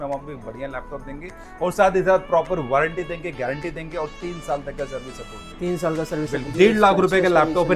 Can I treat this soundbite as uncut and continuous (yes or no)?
no